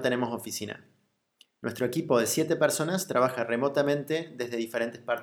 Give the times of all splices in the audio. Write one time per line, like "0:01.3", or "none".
0:04.3